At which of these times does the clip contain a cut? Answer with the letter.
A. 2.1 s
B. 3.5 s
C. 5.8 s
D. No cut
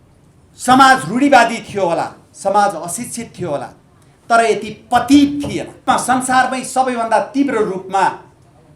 C